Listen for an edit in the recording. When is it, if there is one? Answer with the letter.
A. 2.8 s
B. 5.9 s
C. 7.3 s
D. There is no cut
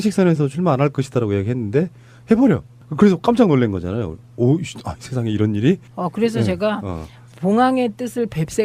B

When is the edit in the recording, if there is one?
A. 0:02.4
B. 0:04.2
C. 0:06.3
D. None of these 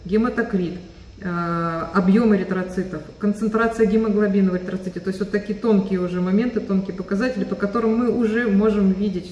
D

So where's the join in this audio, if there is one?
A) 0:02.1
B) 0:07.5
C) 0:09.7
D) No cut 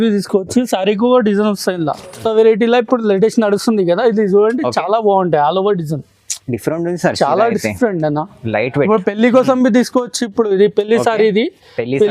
A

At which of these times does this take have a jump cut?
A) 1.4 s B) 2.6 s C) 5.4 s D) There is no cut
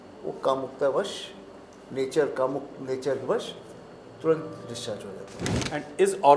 C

